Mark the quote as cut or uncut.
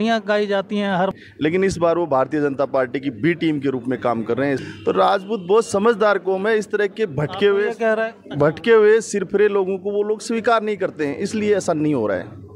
cut